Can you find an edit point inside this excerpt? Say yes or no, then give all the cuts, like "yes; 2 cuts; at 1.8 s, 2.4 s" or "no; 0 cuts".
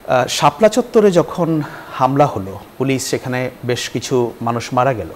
no; 0 cuts